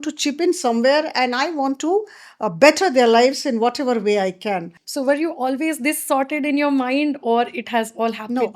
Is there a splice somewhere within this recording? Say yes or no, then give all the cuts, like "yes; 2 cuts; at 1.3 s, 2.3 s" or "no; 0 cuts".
yes; 1 cut; at 4.8 s